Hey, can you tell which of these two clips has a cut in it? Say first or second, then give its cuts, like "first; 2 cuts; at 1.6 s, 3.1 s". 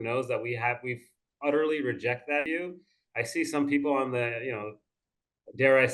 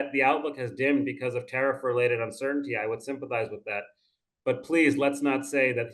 first; 1 cut; at 2.5 s